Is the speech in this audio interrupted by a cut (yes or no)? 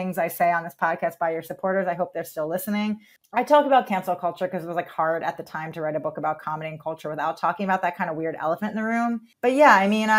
yes